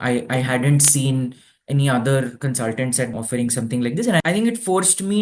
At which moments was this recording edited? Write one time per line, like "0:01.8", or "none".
0:03.1
0:04.2